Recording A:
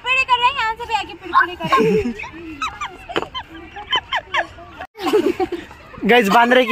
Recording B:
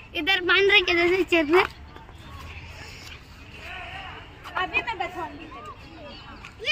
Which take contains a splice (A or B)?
A